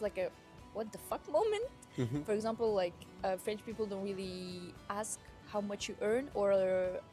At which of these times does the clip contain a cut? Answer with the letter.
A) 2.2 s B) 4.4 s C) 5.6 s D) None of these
A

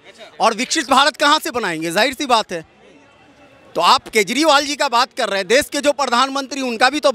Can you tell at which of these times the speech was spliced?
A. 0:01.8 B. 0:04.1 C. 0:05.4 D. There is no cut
D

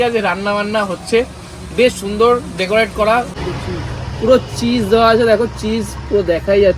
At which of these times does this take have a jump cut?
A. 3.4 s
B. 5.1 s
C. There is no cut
A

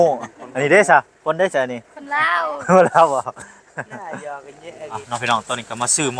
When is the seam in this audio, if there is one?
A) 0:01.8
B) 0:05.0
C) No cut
B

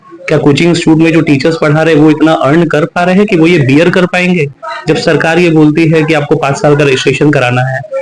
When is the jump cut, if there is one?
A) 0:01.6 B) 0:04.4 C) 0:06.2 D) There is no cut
D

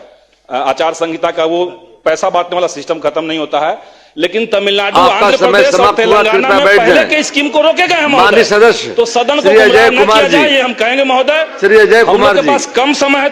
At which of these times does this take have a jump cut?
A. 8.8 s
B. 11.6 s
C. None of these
C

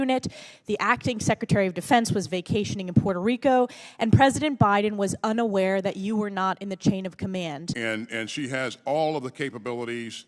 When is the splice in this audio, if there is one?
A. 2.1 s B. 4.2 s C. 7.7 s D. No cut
C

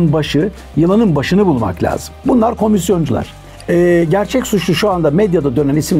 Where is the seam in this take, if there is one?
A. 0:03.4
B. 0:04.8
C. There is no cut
C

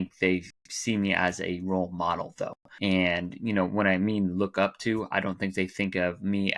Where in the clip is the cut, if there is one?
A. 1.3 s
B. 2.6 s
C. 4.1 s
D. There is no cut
B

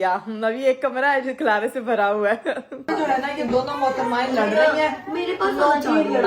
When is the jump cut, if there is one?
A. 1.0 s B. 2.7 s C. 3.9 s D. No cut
B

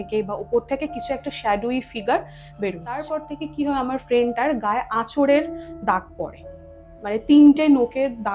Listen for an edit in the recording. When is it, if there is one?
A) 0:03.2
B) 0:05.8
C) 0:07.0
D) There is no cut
A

